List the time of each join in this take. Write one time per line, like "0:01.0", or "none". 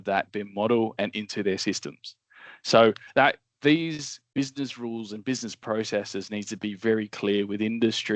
0:04.1